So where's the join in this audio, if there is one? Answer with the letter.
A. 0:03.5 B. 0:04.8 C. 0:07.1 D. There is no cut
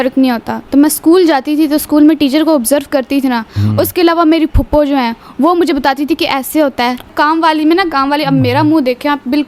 C